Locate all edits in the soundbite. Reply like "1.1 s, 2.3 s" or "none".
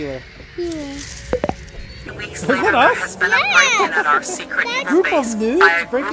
2.0 s